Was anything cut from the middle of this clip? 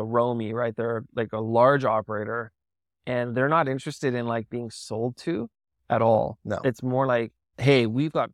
yes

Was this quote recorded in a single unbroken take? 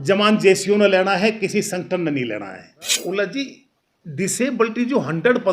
no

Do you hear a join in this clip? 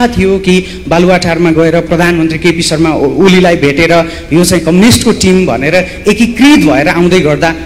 no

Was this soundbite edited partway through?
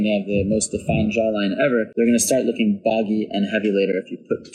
no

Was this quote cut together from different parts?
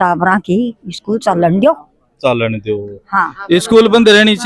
no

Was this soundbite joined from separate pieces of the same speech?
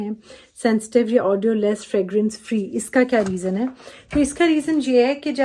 no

